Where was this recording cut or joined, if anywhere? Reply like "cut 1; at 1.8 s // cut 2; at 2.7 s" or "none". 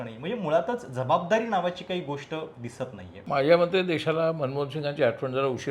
cut 1; at 3.1 s